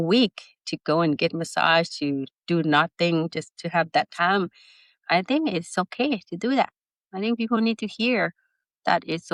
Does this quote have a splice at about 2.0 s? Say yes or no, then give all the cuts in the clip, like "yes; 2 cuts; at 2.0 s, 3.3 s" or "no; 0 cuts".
no; 0 cuts